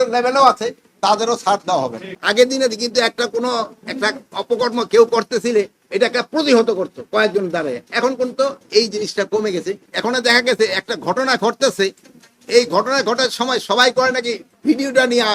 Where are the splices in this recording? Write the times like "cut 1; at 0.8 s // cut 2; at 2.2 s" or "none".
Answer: cut 1; at 2.0 s // cut 2; at 9.8 s